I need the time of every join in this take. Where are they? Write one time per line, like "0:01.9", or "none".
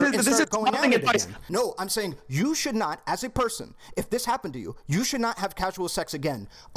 0:01.4

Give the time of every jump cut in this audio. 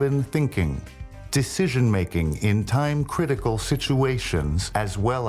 0:04.2

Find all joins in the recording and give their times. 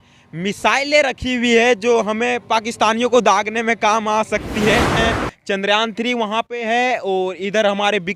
0:04.9

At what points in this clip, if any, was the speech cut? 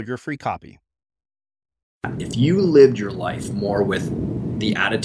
0:02.1

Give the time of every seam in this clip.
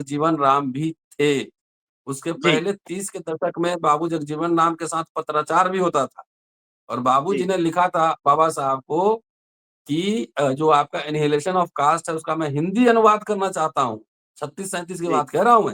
none

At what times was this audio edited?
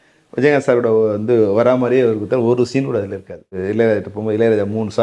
none

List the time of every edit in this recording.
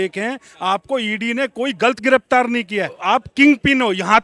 0:02.9

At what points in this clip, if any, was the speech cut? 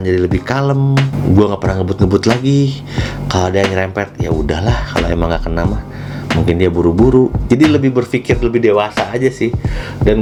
none

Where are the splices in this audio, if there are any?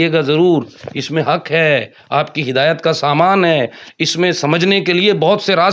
none

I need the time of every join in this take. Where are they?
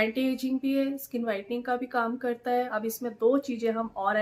0:02.7

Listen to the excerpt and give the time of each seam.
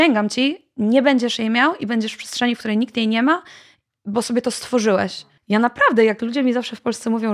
0:05.3

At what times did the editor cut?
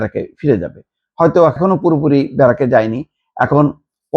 0:01.6

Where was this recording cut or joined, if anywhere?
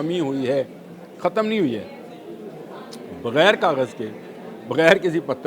none

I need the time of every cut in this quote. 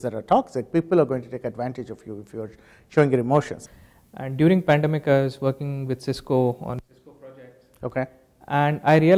0:03.6

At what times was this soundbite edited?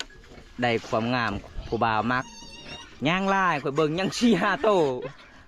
0:01.4

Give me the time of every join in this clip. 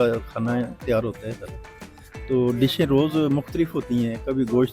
none

